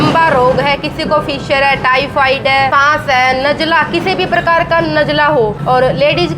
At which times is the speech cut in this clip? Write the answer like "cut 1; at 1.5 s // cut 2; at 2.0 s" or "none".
cut 1; at 2.7 s // cut 2; at 5.6 s

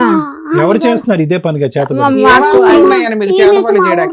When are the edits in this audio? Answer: none

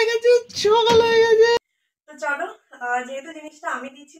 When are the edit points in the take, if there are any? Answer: cut 1; at 1.6 s

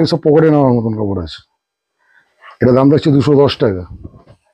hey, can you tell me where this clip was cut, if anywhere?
none

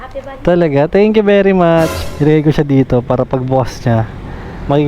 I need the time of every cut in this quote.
cut 1; at 2.0 s

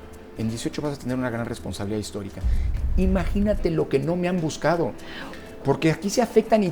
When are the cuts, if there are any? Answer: cut 1; at 2.7 s

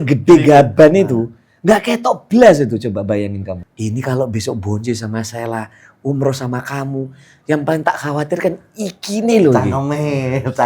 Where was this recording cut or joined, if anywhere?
cut 1; at 3.6 s

